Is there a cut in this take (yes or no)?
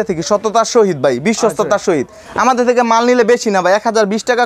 no